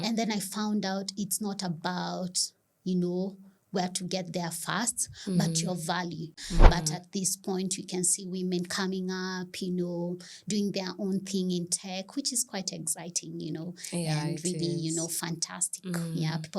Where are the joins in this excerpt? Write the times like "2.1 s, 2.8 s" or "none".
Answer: 6.4 s